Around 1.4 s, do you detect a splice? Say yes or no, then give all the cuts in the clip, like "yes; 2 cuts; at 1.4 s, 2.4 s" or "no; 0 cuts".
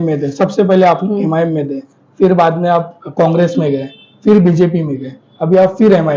no; 0 cuts